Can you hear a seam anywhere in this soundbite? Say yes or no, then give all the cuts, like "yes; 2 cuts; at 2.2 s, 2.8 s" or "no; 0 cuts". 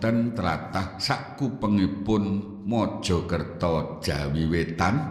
yes; 1 cut; at 2.2 s